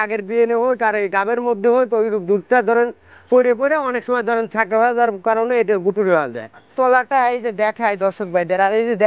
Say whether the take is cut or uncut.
cut